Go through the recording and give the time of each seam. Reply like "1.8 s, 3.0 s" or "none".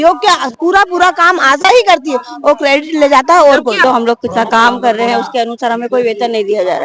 3.8 s